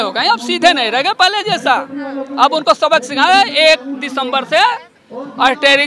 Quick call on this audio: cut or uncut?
uncut